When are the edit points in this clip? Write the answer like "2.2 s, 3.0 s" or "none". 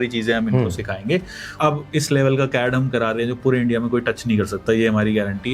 1.5 s